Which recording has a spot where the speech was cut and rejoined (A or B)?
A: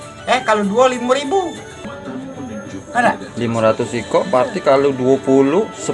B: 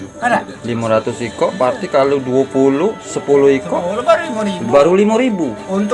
A